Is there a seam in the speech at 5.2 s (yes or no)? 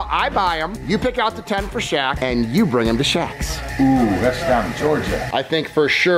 yes